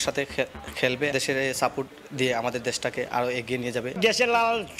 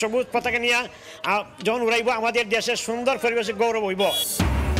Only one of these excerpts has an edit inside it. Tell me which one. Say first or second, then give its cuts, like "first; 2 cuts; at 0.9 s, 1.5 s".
first; 2 cuts; at 1.1 s, 3.9 s